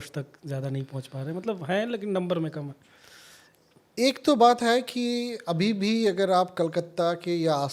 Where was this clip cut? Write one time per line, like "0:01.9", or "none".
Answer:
none